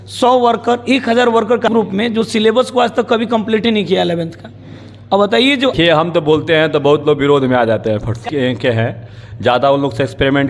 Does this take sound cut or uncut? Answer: cut